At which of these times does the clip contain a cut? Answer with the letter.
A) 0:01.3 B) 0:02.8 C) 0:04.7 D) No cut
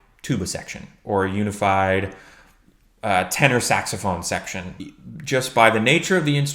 C